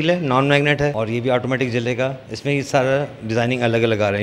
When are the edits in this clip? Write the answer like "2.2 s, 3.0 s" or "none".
0.9 s, 2.3 s